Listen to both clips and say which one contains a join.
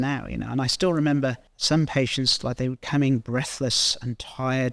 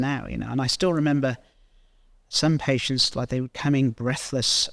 first; 1 cut; at 1.5 s

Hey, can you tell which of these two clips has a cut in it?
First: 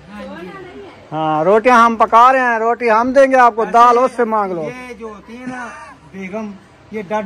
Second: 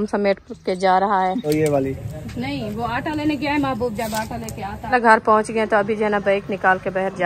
second; 2 cuts; at 1.5 s, 4.9 s

